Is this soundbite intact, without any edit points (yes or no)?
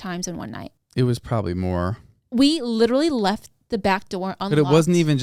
yes